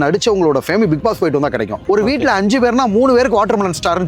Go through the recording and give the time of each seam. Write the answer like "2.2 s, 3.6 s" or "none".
1.8 s